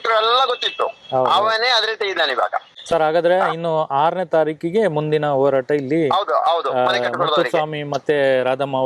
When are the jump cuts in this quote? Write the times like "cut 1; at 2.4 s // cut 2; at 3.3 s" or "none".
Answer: cut 1; at 2.7 s